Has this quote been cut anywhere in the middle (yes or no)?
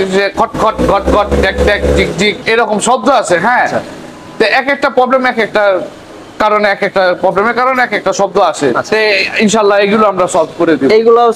no